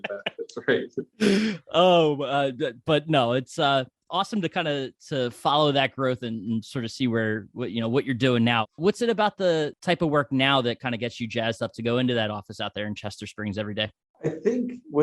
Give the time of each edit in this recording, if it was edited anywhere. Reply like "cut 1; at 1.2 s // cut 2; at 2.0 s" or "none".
cut 1; at 8.7 s // cut 2; at 9.8 s // cut 3; at 14.0 s